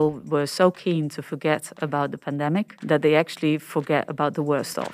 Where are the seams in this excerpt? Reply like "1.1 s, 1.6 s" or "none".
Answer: 2.7 s